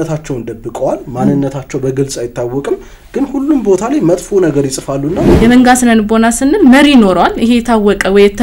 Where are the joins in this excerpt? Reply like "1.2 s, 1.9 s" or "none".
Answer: 5.3 s